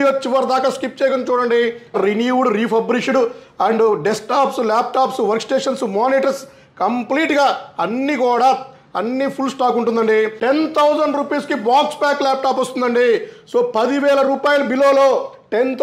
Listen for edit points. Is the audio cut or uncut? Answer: cut